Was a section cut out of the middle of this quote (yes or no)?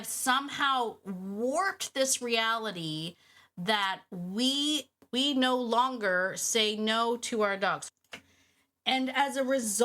yes